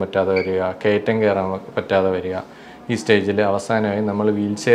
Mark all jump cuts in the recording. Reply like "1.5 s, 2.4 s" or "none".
none

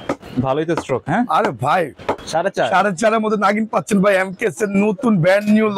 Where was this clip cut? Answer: 2.2 s

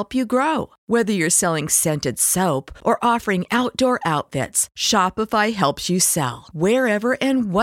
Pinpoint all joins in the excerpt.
none

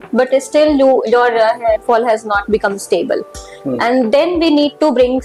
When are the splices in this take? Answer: none

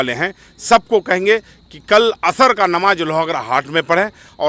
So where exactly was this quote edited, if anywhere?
none

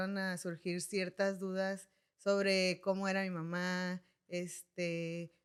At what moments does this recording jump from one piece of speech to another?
none

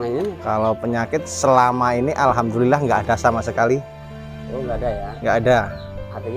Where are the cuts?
none

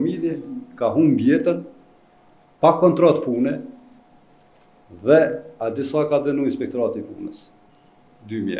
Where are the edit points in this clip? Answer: none

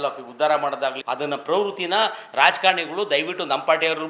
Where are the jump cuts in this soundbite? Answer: 1.0 s

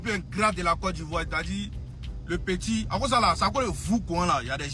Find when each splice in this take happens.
none

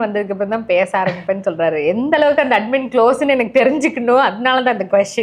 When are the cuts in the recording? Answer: none

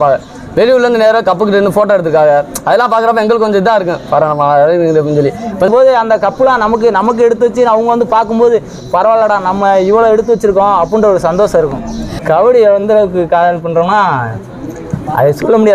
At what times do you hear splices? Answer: 5.7 s, 12.2 s

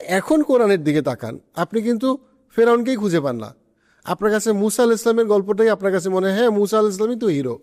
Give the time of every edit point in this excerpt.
none

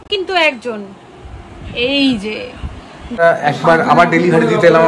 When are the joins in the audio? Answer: 3.1 s

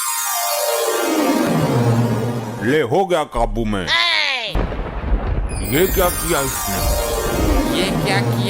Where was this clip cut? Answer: 1.5 s, 4.6 s

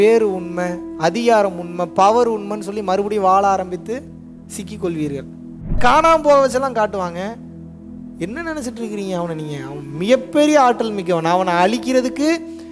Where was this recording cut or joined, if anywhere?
5.8 s

